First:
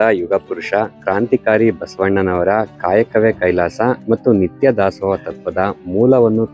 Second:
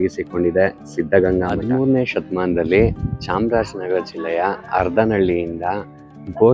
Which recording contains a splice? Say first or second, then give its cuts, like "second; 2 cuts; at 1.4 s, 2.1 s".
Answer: second; 1 cut; at 1.5 s